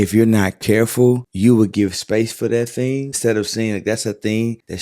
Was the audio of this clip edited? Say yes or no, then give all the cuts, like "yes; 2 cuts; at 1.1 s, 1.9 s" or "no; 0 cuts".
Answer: yes; 2 cuts; at 1.3 s, 3.1 s